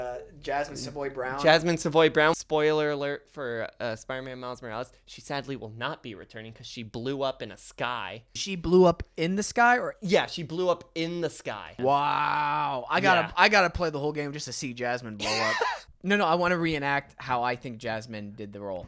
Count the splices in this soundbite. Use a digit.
4